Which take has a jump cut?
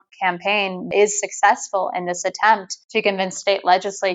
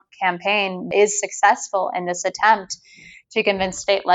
first; 1 cut; at 2.8 s

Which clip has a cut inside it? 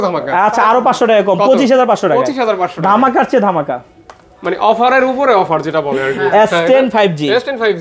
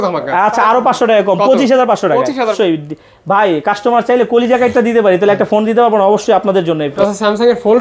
second; 2 cuts; at 2.5 s, 6.9 s

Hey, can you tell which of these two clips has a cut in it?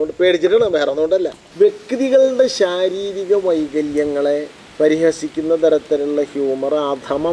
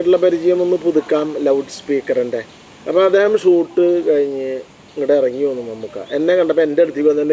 first; 2 cuts; at 1.4 s, 4.6 s

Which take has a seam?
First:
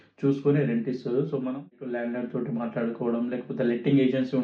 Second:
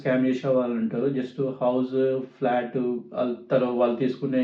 first; 1 cut; at 2.0 s

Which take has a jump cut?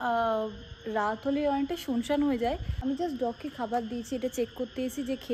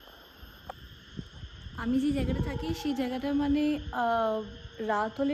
first; 1 cut; at 2.7 s

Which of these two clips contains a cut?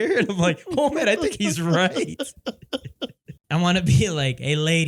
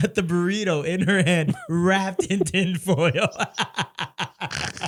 first; 1 cut; at 3.3 s

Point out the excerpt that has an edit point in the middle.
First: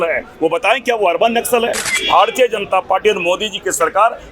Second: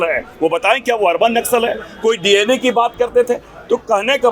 first; 1 cut; at 1.9 s

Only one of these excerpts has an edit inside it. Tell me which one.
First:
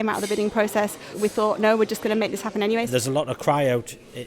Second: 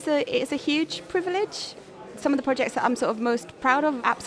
first; 2 cuts; at 1.0 s, 2.9 s

